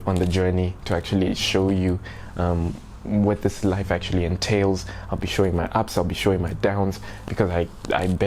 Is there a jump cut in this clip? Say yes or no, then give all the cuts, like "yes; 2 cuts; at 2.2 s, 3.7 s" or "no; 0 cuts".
no; 0 cuts